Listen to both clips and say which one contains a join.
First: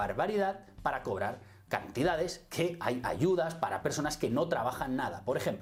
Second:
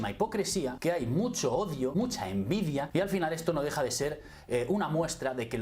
second; 3 cuts; at 0.8 s, 1.9 s, 2.9 s

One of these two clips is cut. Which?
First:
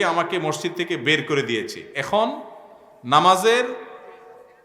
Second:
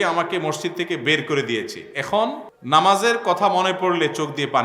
second; 1 cut; at 2.5 s

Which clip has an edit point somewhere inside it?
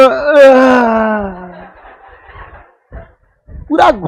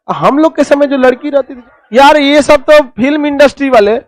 second; 1 cut; at 1.5 s

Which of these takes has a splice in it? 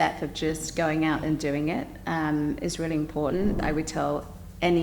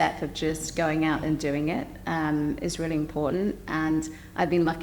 first; 1 cut; at 3.6 s

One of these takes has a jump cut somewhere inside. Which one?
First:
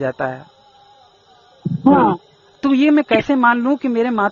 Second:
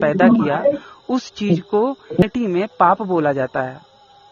second; 1 cut; at 2.2 s

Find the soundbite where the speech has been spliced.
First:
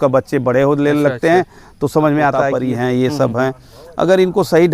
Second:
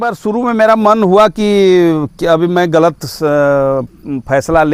first; 1 cut; at 2.5 s

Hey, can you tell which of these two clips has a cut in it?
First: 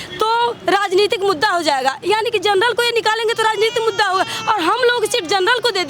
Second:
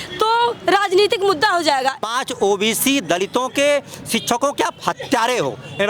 second; 1 cut; at 2.0 s

